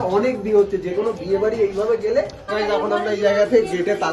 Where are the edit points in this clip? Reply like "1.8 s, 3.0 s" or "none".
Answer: 2.5 s